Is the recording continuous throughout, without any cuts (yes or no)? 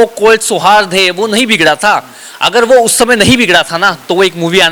yes